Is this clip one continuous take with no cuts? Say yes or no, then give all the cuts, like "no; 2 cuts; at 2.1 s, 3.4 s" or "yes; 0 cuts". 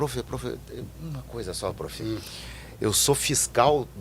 yes; 0 cuts